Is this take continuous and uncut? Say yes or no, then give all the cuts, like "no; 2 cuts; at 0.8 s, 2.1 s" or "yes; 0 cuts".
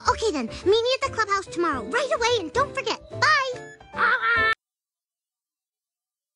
yes; 0 cuts